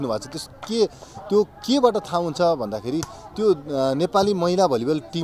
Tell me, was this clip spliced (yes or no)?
no